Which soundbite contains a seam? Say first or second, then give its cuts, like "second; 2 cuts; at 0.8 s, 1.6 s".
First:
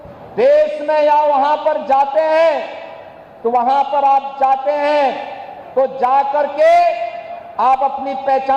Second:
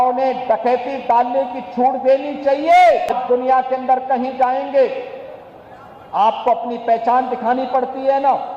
second; 1 cut; at 3.2 s